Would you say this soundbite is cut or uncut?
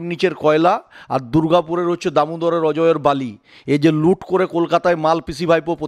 uncut